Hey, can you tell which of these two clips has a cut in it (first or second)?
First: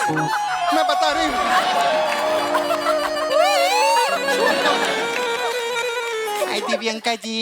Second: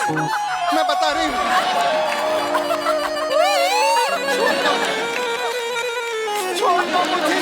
first